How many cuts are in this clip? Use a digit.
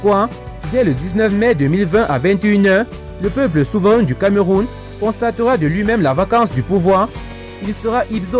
1